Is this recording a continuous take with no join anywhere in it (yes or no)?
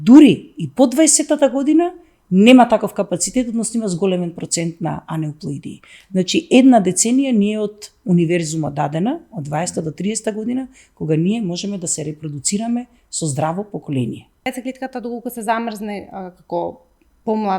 no